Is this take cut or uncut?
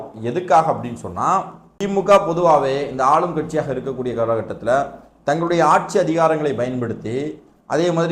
cut